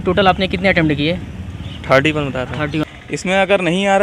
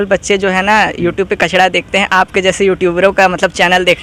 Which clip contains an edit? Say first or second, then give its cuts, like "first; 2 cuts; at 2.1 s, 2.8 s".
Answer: first; 1 cut; at 2.8 s